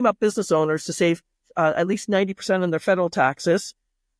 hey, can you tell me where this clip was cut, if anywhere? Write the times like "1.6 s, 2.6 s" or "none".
none